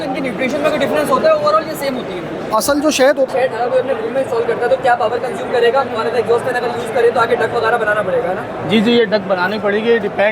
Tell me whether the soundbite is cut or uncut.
cut